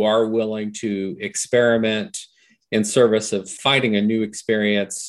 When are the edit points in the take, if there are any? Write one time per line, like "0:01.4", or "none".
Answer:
0:03.5